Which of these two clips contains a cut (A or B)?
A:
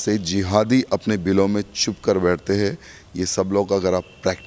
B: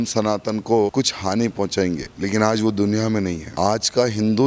B